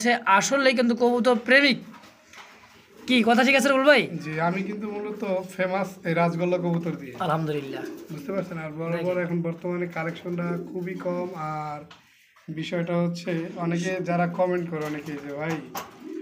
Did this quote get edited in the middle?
no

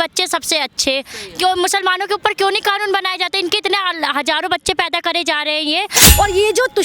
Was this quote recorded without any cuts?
no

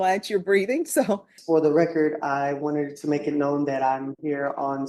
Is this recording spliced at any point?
yes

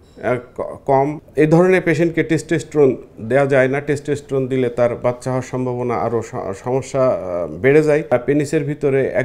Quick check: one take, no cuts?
no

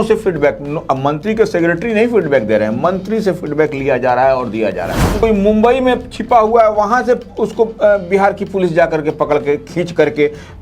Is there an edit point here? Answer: yes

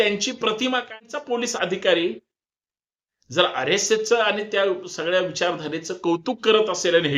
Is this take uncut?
no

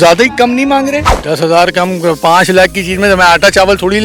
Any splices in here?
yes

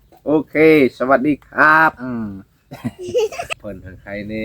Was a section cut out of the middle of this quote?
yes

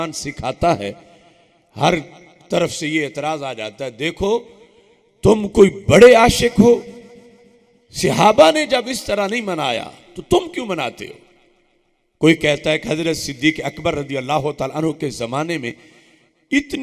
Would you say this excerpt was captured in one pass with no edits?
yes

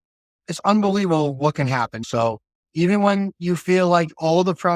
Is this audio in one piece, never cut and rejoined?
no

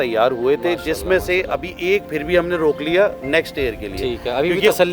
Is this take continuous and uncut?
yes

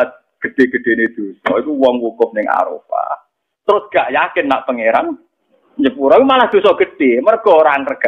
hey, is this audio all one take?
yes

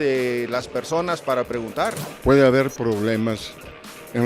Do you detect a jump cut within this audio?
yes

